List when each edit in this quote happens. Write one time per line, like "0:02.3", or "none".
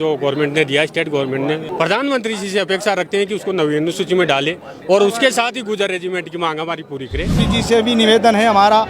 0:01.6
0:07.4